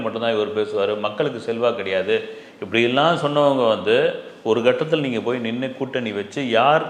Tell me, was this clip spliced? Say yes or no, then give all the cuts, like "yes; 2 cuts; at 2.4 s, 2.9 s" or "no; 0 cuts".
no; 0 cuts